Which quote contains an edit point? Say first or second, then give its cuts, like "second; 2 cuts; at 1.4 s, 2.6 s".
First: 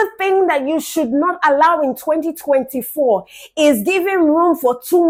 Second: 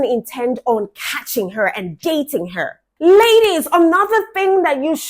second; 1 cut; at 2.8 s